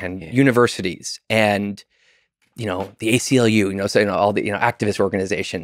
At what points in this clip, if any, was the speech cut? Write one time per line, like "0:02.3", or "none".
none